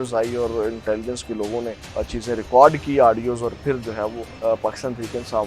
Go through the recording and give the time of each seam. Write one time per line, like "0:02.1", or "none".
0:01.8
0:04.3